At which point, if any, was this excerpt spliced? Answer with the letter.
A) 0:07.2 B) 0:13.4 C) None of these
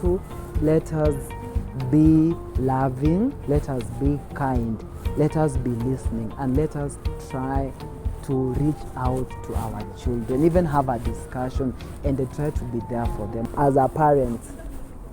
B